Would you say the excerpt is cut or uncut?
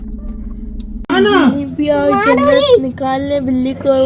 cut